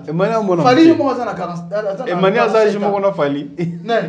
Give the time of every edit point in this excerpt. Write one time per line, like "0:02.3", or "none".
none